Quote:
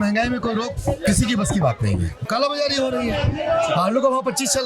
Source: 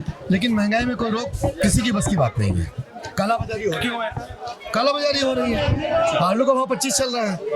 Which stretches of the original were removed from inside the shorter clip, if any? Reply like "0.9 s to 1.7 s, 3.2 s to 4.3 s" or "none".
2.7 s to 4.6 s